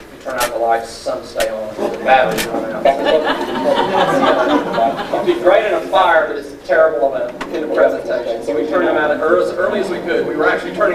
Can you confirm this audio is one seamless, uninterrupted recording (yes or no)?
no